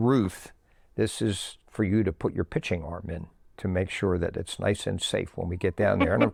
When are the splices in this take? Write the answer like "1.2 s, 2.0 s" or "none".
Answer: none